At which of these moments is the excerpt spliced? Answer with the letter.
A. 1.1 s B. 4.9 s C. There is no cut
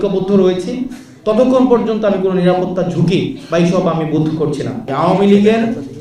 B